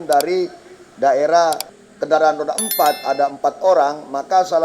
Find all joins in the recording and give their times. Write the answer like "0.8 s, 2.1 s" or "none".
1.7 s

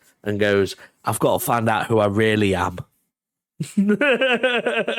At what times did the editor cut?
none

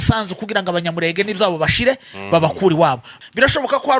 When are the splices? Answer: 3.1 s

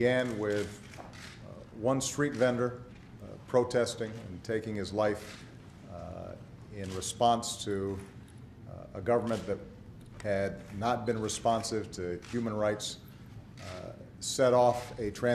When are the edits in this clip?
10.3 s

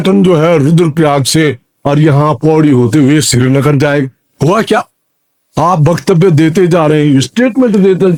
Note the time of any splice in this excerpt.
none

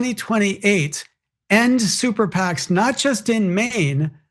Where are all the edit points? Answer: none

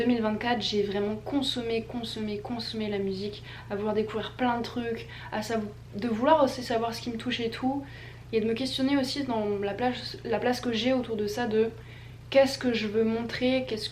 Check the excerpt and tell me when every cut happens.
none

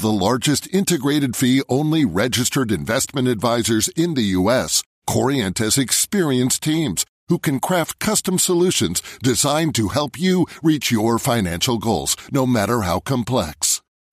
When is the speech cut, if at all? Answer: none

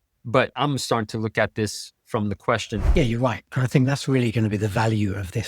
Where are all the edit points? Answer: 2.9 s

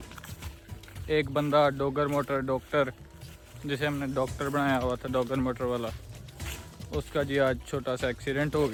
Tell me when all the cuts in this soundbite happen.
none

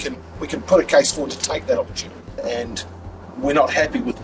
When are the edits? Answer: 2.4 s

